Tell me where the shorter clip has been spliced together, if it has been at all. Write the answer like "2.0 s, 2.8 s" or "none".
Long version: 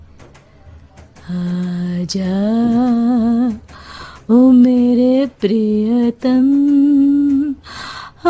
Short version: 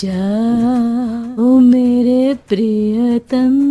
1.1 s